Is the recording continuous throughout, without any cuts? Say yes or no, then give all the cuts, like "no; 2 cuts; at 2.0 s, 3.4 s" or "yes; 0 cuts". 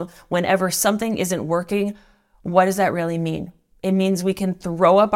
yes; 0 cuts